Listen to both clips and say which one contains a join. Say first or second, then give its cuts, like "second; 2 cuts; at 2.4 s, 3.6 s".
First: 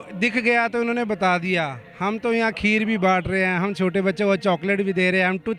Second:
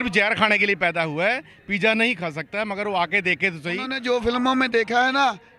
second; 1 cut; at 3.9 s